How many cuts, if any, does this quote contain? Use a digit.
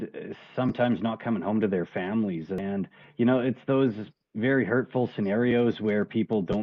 1